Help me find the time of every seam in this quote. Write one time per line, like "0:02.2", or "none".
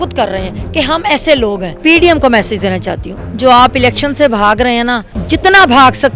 0:01.7
0:05.1